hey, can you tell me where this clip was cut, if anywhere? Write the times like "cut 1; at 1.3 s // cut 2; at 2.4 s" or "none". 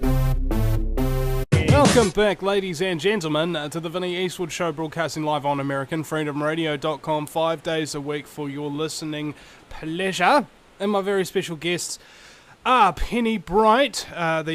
cut 1; at 1.4 s